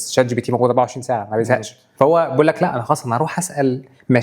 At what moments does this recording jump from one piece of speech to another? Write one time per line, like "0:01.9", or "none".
0:01.8